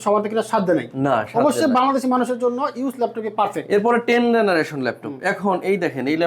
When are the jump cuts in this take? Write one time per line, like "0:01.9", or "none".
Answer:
none